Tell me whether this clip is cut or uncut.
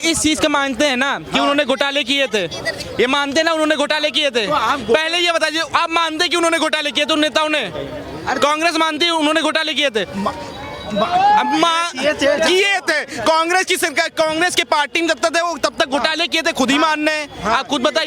uncut